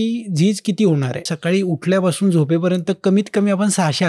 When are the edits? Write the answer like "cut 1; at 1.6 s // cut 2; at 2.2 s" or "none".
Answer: cut 1; at 1.3 s